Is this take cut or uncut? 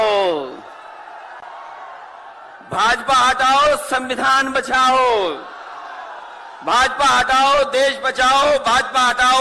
uncut